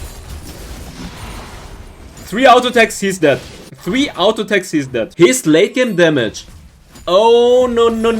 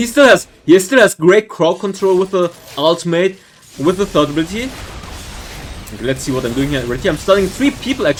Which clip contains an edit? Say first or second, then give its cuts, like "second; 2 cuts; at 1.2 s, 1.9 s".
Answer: first; 1 cut; at 5.1 s